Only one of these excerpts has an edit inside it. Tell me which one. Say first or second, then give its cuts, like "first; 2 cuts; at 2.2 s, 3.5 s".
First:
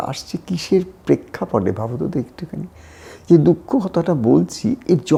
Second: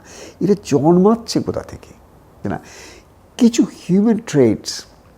second; 1 cut; at 2.4 s